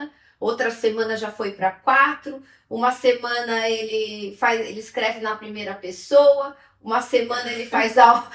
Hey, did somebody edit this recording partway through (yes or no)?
no